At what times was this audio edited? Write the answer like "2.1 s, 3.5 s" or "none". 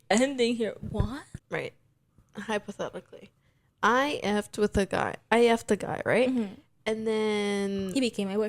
1.3 s

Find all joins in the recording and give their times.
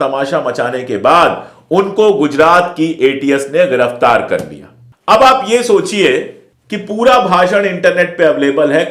none

